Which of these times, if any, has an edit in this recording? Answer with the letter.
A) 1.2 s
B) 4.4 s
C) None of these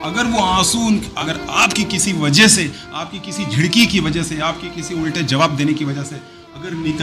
A